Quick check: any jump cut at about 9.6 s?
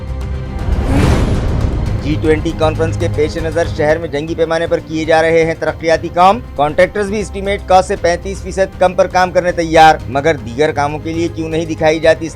no; 1 cut; at 1.9 s

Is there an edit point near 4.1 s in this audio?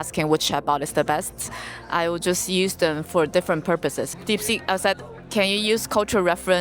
yes; 1 cut; at 4.1 s

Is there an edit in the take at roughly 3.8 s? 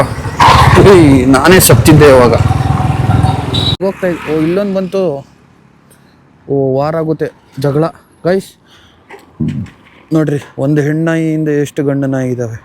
yes; 1 cut; at 3.8 s

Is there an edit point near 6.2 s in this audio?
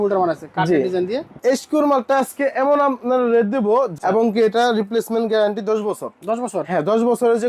no; 2 cuts; at 1.3 s, 3.9 s

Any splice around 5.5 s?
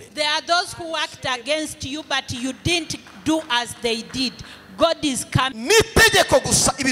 yes; 1 cut; at 5.5 s

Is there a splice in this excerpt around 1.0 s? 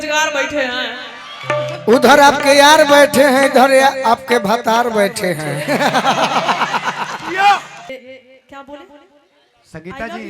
no; 1 cut; at 7.8 s

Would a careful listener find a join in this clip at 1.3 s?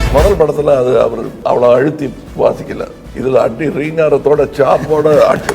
yes; 3 cuts; at 1.3 s, 2.2 s, 3.0 s

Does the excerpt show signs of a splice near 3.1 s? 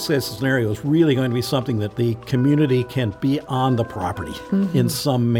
yes; 2 cuts; at 1.9 s, 3.1 s

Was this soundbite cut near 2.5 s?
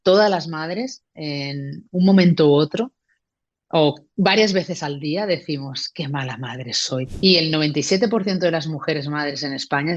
no; 1 cut; at 7.1 s

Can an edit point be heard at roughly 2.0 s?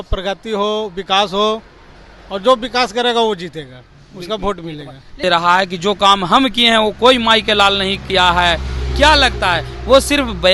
no; 1 cut; at 5.2 s

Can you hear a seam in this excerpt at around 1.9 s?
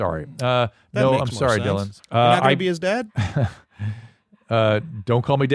yes; 2 cuts; at 1.9 s, 3.2 s

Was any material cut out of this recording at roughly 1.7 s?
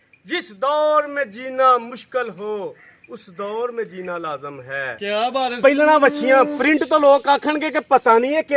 no; 1 cut; at 5.6 s

